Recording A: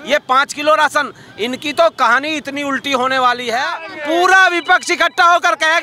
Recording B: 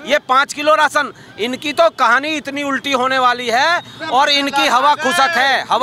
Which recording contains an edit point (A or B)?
A